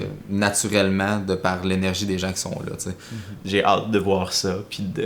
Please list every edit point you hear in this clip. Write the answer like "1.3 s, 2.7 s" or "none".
3.4 s